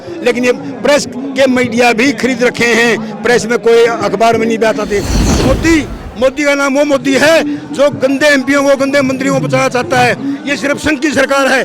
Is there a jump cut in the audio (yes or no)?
yes